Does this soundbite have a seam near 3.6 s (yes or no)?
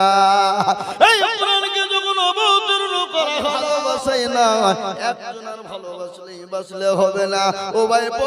yes